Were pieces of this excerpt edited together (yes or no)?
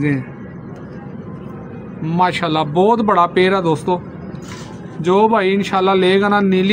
no